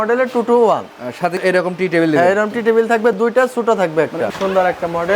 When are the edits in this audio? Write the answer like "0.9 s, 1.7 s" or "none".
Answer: 1.4 s, 4.3 s